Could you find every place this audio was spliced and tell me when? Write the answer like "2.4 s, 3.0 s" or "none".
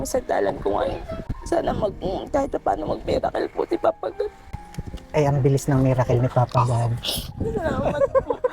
1.1 s